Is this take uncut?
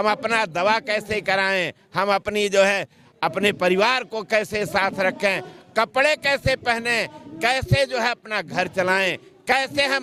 yes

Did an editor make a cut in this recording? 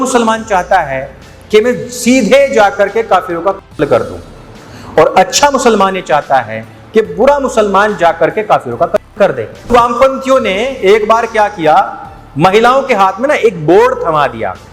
yes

